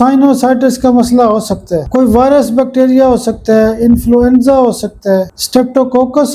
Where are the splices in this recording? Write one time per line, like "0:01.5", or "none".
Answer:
0:01.8
0:05.4